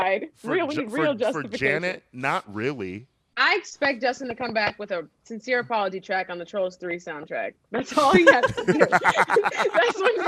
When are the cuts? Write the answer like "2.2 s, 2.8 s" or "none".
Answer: 3.4 s